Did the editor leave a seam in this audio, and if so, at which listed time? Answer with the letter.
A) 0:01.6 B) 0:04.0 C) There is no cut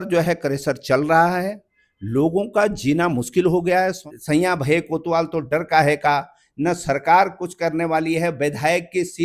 B